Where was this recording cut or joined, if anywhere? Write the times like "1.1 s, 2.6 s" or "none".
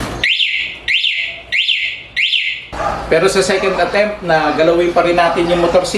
2.7 s